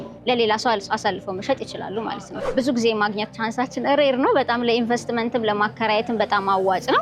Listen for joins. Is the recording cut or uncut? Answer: cut